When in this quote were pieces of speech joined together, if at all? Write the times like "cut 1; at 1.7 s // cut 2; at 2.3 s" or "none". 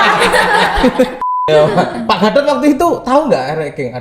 cut 1; at 1.4 s

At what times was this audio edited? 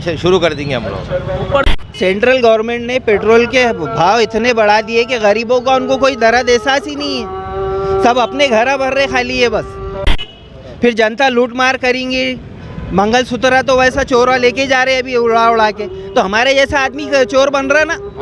cut 1; at 1.7 s // cut 2; at 10.1 s

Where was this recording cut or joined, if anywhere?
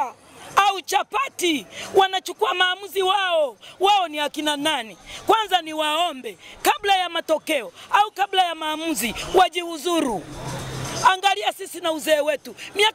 none

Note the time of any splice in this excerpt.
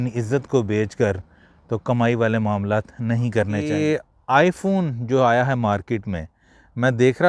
cut 1; at 3.6 s

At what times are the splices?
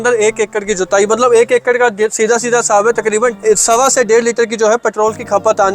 cut 1; at 3.3 s

